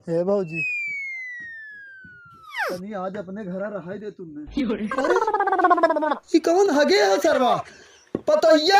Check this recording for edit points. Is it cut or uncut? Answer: cut